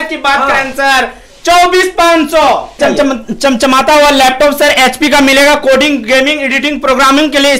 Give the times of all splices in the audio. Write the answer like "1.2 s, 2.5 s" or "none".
2.8 s